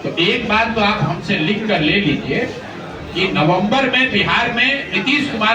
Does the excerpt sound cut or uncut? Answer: uncut